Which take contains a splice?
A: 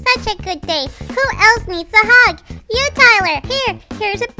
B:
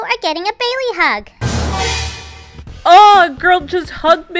A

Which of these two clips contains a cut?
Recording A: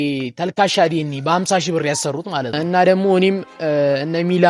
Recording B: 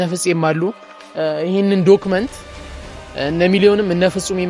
A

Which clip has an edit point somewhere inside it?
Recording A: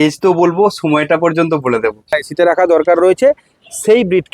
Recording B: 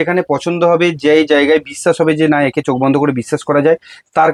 A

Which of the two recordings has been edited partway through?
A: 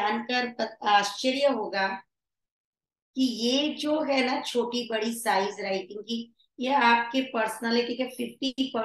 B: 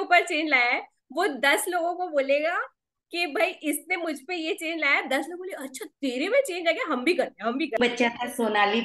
B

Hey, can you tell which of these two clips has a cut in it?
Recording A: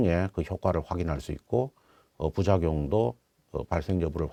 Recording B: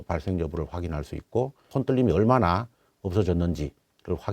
B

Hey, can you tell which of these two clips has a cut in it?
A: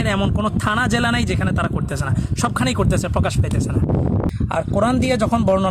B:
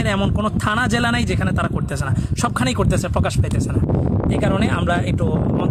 A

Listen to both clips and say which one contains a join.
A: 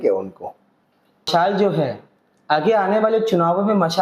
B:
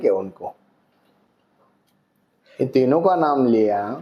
A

